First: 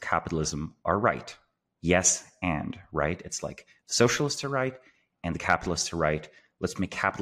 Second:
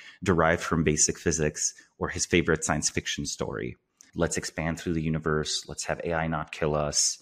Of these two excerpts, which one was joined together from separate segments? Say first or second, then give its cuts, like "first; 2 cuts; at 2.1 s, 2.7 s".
second; 1 cut; at 4.0 s